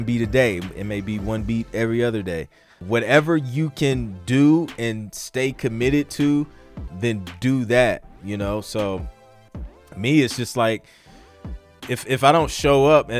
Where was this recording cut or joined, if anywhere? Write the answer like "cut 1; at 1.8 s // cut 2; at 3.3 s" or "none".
cut 1; at 2.8 s // cut 2; at 6.9 s